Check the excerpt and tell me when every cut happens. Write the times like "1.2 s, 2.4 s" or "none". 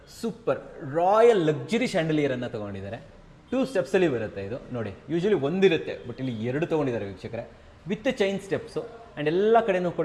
none